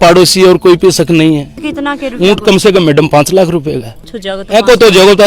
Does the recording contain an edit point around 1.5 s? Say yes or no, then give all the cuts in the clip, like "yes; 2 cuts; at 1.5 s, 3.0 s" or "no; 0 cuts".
yes; 1 cut; at 1.5 s